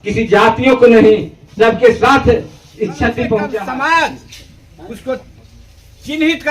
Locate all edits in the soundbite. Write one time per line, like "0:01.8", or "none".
0:03.6